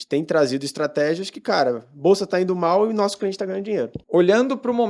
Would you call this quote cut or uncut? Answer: cut